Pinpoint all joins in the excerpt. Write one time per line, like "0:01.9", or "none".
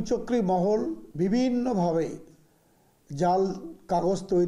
0:01.0